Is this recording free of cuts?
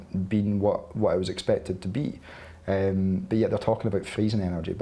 yes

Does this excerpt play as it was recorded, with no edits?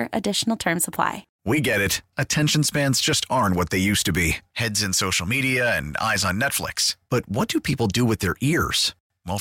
no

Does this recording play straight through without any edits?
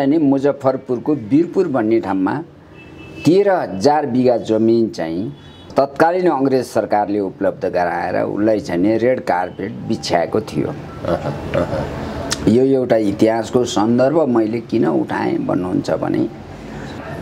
yes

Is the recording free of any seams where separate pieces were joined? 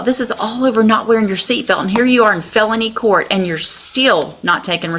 yes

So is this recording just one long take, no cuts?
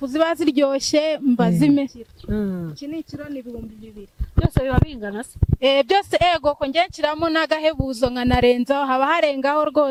yes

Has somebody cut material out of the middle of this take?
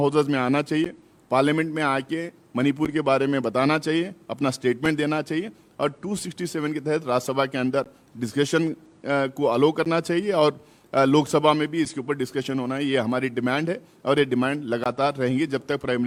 no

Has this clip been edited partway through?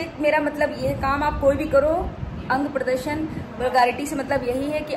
no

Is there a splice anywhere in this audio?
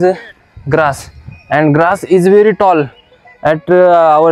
no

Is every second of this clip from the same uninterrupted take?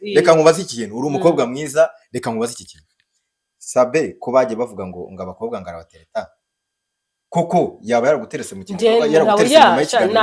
yes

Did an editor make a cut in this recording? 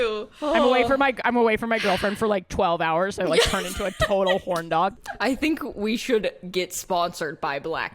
yes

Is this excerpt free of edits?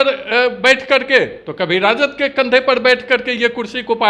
yes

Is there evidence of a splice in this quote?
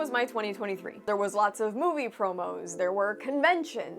yes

